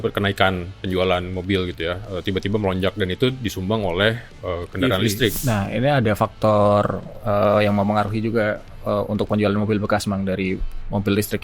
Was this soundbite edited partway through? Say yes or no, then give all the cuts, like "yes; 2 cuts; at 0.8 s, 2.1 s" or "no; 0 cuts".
yes; 1 cut; at 5.4 s